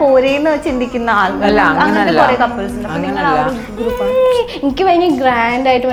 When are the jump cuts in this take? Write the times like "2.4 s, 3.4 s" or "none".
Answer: none